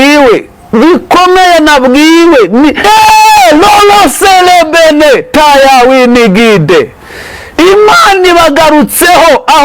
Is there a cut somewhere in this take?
yes; 1 cut; at 2.8 s

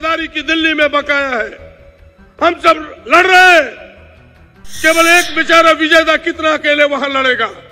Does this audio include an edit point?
no; 0 cuts

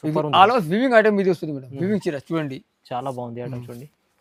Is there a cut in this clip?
no; 0 cuts

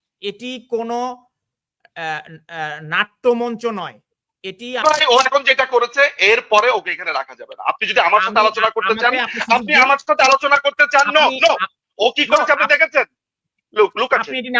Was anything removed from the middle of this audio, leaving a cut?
yes; 1 cut; at 4.8 s

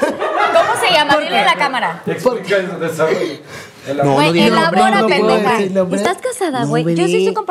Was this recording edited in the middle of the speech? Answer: no; 0 cuts

